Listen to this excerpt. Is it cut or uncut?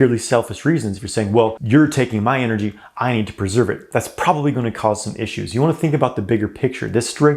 cut